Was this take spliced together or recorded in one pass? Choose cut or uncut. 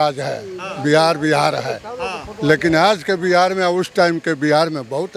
uncut